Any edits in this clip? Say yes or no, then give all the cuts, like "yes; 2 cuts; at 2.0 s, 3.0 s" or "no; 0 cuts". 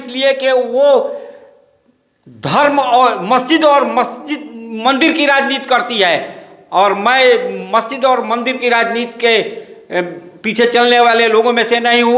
no; 0 cuts